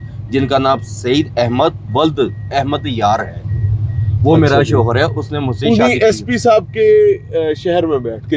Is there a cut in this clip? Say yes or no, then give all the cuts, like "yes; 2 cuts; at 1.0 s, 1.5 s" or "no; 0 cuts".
no; 0 cuts